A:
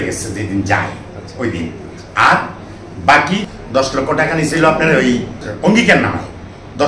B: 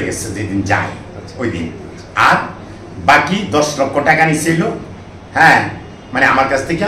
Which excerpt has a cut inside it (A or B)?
A